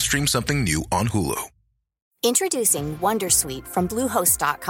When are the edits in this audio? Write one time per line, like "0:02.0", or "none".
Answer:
0:02.0